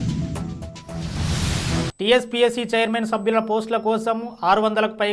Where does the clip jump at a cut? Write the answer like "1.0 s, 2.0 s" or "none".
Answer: 1.9 s